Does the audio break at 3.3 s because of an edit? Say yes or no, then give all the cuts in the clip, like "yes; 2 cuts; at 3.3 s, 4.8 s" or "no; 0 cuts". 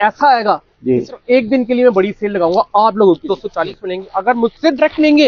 yes; 1 cut; at 3.3 s